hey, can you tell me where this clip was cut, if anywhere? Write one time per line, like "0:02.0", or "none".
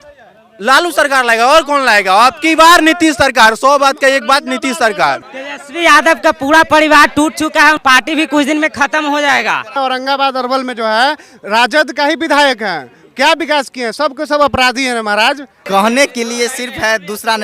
0:05.2
0:07.8
0:09.8
0:15.5